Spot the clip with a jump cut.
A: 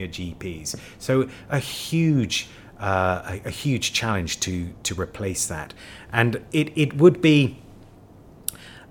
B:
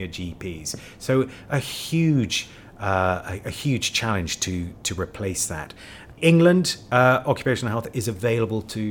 B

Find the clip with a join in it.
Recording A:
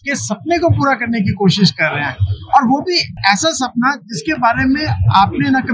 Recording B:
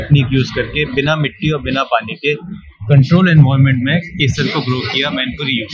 A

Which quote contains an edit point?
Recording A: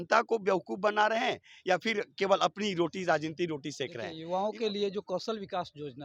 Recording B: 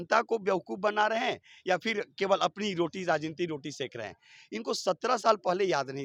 A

